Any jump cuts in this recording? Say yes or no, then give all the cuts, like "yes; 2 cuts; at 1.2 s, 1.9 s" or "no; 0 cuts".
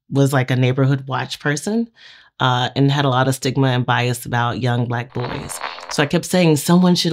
yes; 1 cut; at 5.5 s